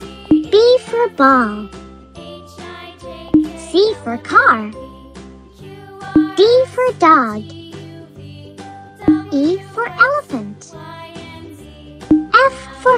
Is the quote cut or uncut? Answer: uncut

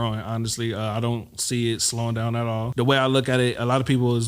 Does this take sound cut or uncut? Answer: cut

